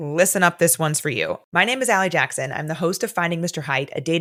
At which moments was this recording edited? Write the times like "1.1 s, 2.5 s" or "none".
none